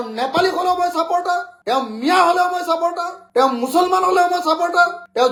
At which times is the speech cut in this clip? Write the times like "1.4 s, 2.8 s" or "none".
none